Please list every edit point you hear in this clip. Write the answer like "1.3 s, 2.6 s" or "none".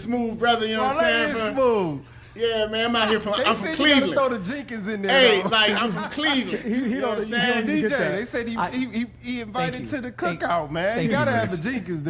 none